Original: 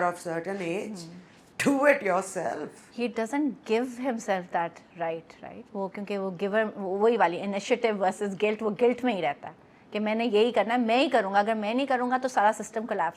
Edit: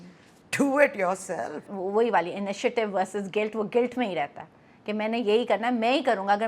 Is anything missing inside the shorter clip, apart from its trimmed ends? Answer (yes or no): yes